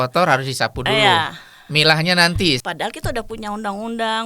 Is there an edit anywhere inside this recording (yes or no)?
yes